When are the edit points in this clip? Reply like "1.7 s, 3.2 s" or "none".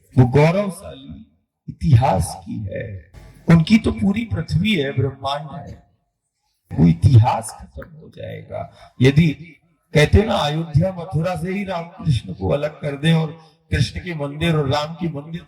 3.0 s, 6.6 s